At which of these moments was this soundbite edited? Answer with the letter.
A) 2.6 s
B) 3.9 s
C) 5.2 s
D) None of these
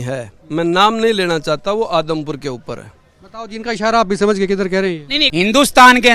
C